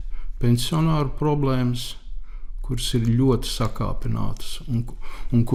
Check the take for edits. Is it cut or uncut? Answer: uncut